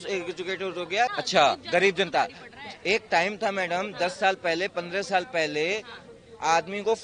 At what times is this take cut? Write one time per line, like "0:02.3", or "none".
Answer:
0:01.2